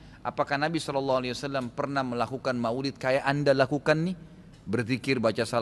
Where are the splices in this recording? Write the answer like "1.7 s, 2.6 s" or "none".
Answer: none